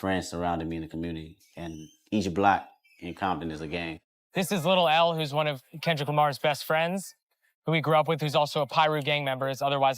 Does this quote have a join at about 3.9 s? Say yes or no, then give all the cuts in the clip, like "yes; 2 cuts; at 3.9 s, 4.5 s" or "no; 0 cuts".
yes; 1 cut; at 3.9 s